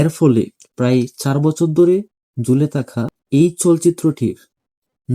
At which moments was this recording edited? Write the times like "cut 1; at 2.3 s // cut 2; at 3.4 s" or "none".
cut 1; at 3.1 s